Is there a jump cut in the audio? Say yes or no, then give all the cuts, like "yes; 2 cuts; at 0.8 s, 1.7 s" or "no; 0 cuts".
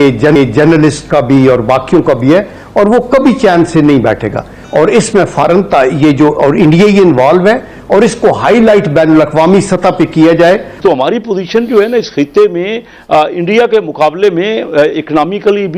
yes; 2 cuts; at 4.6 s, 10.7 s